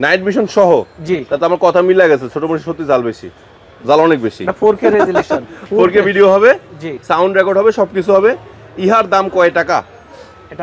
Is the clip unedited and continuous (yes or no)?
yes